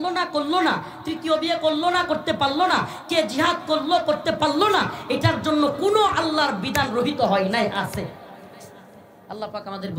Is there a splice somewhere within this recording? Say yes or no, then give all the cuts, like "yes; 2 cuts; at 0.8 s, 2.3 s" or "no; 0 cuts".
no; 0 cuts